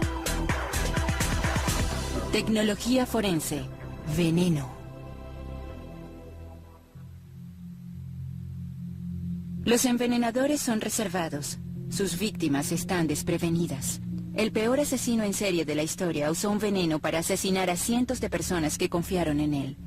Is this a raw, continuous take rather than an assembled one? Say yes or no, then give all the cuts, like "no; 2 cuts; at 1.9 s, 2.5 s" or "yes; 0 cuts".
no; 1 cut; at 16.8 s